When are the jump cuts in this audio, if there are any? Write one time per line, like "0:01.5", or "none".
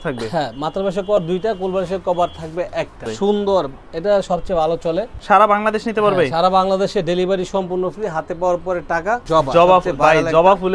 0:03.1
0:05.2
0:09.2